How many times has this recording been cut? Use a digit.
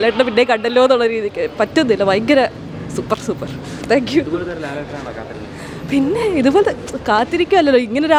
0